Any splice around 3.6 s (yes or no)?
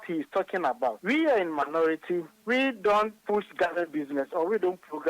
no